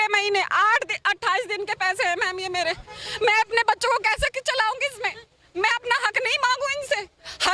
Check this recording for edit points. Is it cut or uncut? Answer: uncut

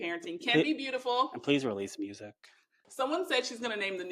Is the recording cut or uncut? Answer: cut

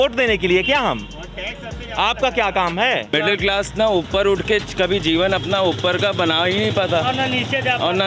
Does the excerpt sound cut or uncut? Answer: cut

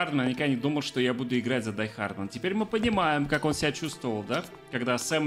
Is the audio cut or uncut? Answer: uncut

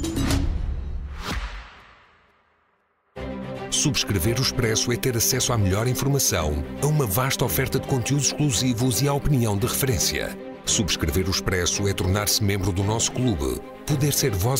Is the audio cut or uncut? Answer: cut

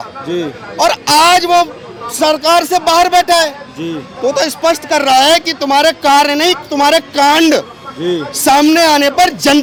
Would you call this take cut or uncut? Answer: uncut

